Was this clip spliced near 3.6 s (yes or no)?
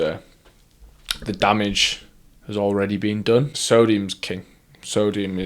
yes